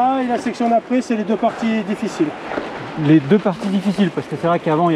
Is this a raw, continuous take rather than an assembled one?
yes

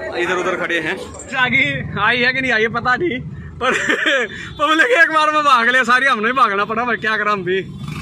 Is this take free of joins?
no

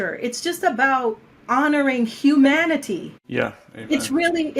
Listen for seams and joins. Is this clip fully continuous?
no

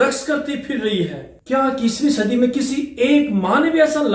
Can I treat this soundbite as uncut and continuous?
no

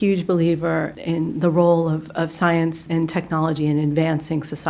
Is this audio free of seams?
no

